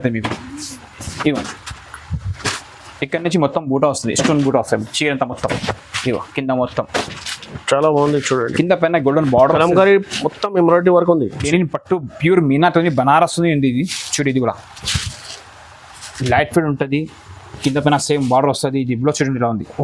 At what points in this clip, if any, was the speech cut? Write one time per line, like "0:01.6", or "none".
0:11.5